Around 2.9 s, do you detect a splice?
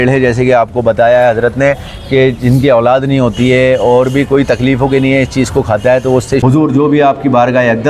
no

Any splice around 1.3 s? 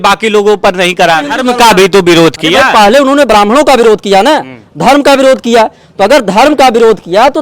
yes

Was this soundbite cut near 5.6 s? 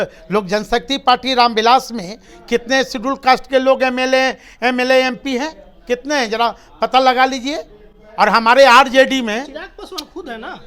no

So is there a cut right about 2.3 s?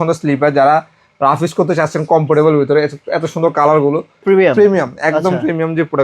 no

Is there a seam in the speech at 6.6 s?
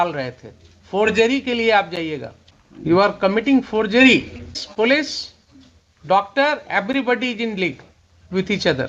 no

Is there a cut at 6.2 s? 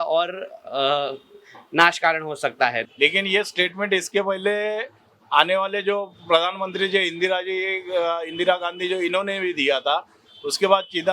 no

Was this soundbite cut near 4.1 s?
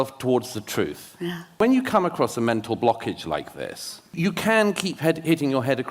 yes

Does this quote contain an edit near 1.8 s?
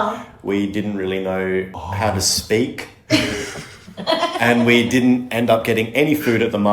yes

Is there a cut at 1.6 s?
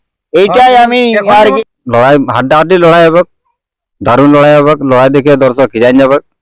yes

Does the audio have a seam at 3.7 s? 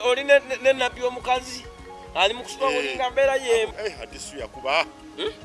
yes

